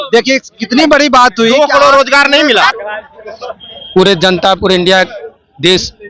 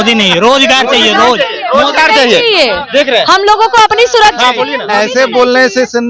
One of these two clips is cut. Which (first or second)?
first